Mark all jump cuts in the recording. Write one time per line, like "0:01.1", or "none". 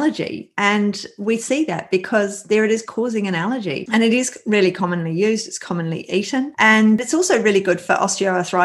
0:03.8
0:07.0